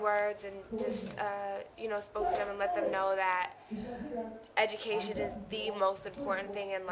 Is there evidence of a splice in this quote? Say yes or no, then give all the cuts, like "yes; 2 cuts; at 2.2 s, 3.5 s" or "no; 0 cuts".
yes; 1 cut; at 2.1 s